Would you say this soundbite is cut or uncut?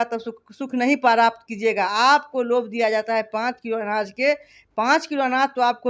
uncut